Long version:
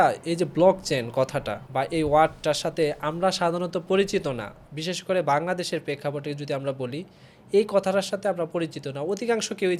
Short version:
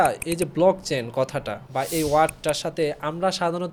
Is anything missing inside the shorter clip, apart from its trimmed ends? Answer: no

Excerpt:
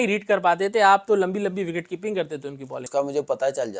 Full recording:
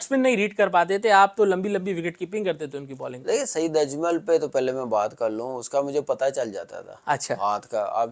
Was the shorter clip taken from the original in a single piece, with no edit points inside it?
no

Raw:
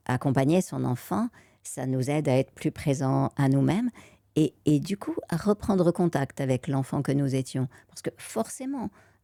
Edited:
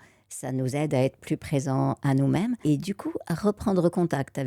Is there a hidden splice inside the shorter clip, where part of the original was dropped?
yes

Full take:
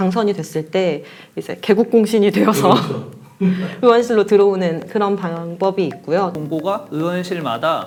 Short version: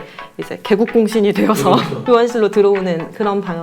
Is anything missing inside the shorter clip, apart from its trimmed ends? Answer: yes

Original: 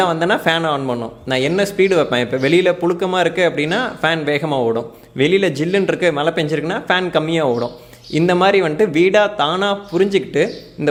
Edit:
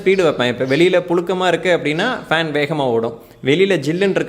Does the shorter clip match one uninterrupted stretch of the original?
yes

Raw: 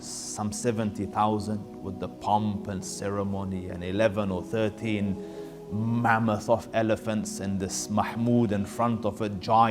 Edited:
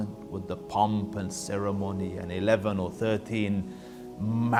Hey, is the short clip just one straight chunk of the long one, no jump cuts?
yes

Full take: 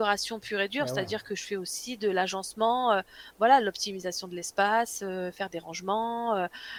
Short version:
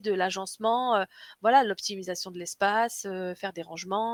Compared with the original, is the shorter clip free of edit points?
yes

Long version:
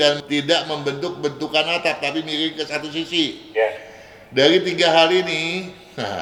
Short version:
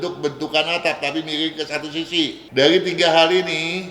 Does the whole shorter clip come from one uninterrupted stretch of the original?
no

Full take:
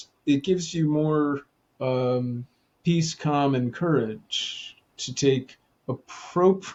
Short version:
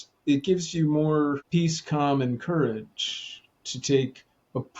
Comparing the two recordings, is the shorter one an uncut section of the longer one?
no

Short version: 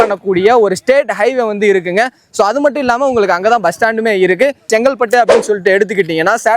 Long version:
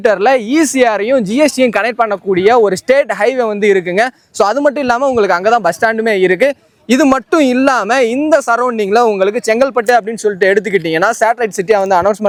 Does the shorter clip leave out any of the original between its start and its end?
yes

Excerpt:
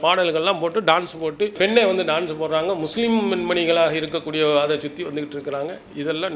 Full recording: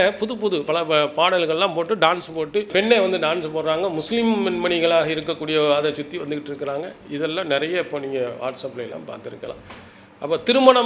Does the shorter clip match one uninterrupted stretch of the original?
yes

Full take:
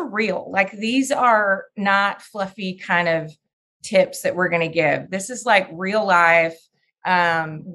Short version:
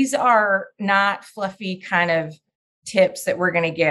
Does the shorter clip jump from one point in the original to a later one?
no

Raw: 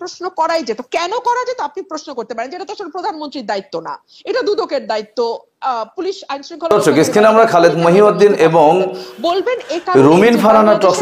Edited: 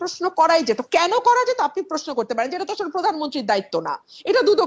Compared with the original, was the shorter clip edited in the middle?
no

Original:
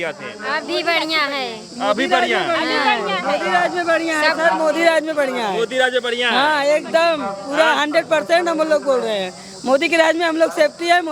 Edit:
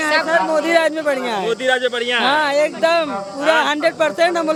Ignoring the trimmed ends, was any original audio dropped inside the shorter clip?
no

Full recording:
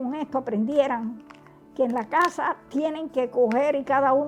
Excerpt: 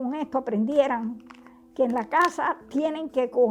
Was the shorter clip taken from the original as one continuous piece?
yes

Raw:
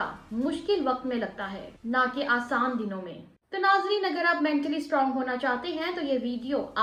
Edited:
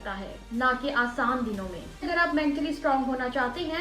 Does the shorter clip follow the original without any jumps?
no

